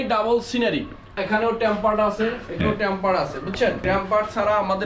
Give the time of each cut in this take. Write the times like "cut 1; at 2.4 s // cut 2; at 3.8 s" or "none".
cut 1; at 1.1 s // cut 2; at 2.6 s // cut 3; at 3.8 s